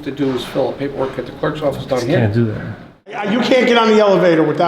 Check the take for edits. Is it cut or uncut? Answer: cut